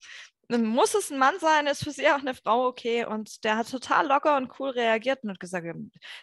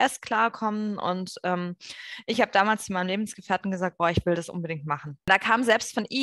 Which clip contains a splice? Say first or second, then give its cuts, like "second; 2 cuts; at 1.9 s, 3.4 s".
second; 1 cut; at 5.3 s